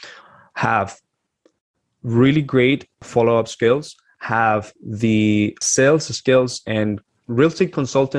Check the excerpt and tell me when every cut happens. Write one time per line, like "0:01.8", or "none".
0:03.0
0:05.6
0:07.0

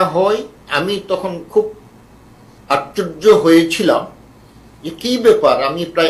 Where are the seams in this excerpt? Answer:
none

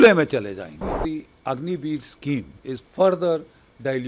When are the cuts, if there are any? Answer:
0:01.0
0:02.5

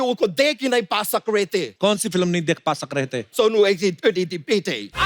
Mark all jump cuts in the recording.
0:01.7
0:03.3

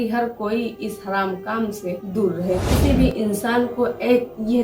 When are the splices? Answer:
0:02.7

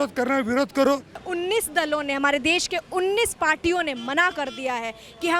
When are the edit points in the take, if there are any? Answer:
0:01.2

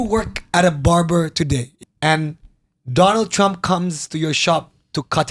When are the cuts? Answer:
0:01.8

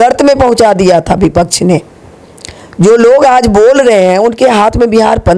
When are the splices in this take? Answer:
none

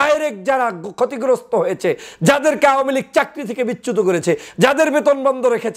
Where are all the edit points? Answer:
none

